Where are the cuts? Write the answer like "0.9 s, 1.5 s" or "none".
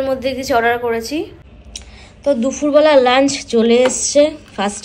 1.8 s